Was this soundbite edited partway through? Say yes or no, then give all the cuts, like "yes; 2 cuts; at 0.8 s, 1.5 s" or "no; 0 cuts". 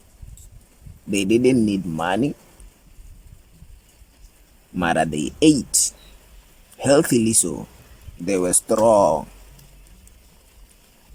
no; 0 cuts